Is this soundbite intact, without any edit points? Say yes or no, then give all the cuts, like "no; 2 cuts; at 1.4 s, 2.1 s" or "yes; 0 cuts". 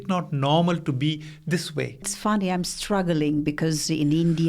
no; 1 cut; at 2.1 s